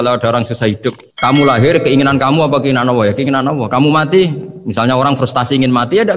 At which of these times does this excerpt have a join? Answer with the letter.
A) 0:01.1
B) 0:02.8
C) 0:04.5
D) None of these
A